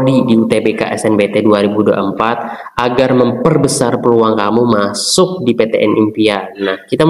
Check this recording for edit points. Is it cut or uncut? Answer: uncut